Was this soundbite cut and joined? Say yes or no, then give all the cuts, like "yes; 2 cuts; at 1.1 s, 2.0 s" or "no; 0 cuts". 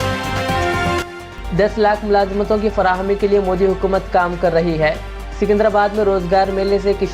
yes; 1 cut; at 1.0 s